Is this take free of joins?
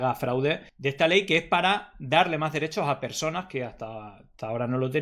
yes; 0 cuts

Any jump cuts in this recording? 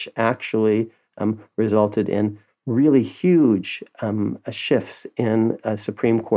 no; 0 cuts

